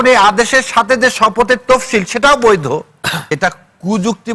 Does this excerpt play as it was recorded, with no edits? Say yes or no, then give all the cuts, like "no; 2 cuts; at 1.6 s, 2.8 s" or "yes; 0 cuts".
no; 1 cut; at 3.3 s